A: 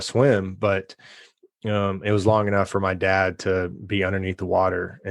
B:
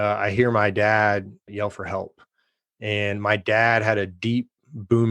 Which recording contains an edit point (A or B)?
B